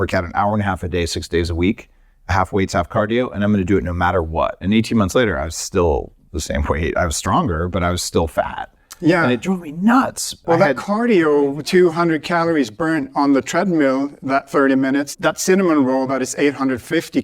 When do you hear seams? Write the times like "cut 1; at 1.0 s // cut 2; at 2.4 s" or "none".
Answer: cut 1; at 10.4 s // cut 2; at 13.1 s // cut 3; at 15.1 s